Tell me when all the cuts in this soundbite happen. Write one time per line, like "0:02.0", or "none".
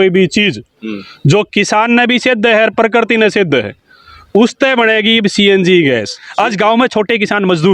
0:06.2